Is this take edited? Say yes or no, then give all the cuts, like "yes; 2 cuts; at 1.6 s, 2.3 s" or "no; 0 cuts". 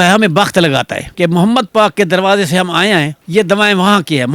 yes; 1 cut; at 1.1 s